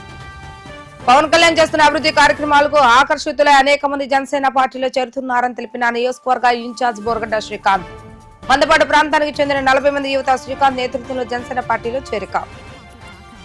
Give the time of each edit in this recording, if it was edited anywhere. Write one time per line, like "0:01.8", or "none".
0:01.1